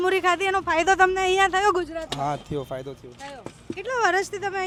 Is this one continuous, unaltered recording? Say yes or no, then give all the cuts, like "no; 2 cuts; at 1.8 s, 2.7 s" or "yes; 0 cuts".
yes; 0 cuts